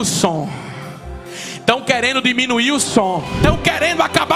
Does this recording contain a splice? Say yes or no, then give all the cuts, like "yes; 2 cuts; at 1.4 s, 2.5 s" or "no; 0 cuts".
yes; 1 cut; at 3.4 s